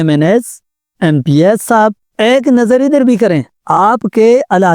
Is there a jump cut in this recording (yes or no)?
yes